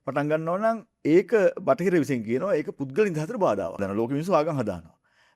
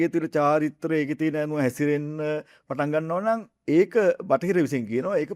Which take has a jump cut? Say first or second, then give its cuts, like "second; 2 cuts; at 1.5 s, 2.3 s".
first; 1 cut; at 3.8 s